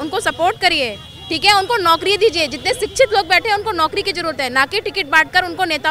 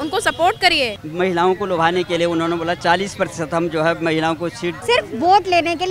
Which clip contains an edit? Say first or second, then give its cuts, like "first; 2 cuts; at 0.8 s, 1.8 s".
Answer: second; 2 cuts; at 1.0 s, 4.8 s